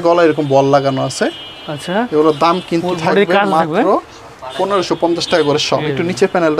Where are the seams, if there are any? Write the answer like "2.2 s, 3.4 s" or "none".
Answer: none